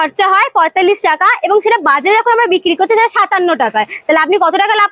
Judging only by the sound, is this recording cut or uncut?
uncut